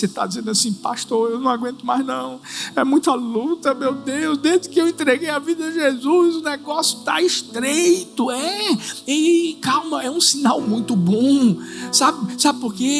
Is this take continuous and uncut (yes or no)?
yes